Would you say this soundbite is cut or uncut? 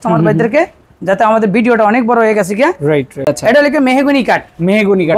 cut